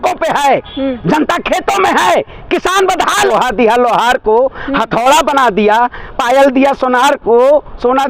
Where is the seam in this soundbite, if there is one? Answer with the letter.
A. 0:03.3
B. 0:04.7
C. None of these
A